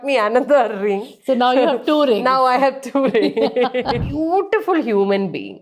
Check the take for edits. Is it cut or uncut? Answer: cut